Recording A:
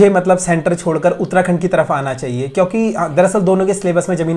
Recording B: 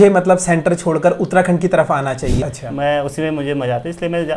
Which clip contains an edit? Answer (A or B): B